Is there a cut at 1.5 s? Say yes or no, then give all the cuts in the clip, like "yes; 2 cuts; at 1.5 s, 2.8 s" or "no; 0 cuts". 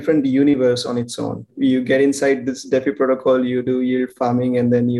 yes; 1 cut; at 1.5 s